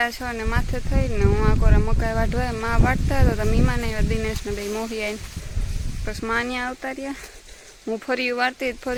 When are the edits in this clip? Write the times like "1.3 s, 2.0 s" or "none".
none